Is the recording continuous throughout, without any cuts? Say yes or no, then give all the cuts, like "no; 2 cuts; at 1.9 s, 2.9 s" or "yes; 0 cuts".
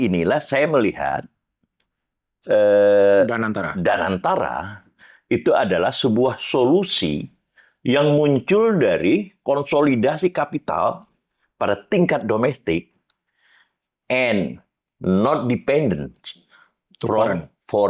yes; 0 cuts